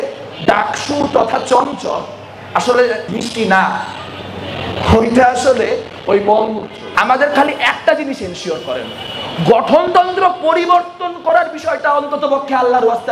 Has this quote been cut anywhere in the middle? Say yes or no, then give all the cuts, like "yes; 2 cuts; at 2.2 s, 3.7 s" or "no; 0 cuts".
yes; 2 cuts; at 3.1 s, 6.8 s